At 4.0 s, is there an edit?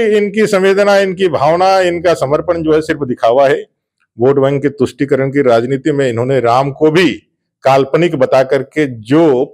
no; 0 cuts

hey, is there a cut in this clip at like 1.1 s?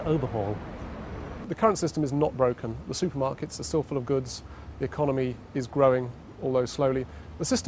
yes; 1 cut; at 1.1 s

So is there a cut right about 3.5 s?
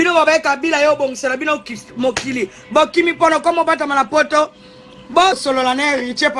no; 1 cut; at 5.4 s

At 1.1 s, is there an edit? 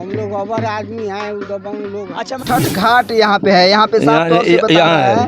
no; 1 cut; at 2.4 s

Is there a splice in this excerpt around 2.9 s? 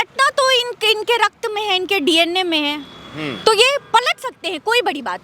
no; 0 cuts

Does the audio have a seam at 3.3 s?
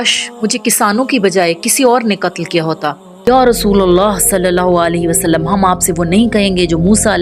yes; 1 cut; at 3.3 s

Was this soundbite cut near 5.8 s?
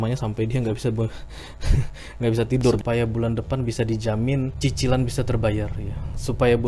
no; 2 cuts; at 2.8 s, 4.5 s

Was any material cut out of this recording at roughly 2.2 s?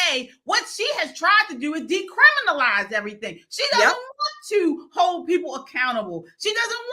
no; 0 cuts

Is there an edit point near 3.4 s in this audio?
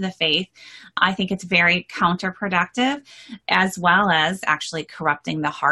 yes; 3 cuts; at 1.0 s, 3.4 s, 4.4 s

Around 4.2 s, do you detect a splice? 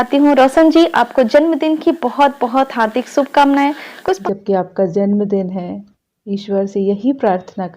yes; 1 cut; at 4.2 s

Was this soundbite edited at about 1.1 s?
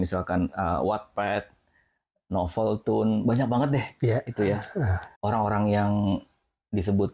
no; 1 cut; at 5.1 s

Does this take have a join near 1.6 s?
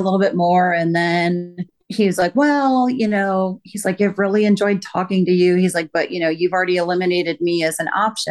no; 0 cuts

